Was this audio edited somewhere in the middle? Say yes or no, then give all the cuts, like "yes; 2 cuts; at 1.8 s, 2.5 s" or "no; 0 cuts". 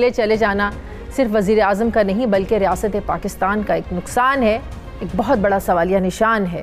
no; 0 cuts